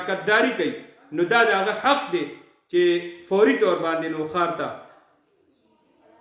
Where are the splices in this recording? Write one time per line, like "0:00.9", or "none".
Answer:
none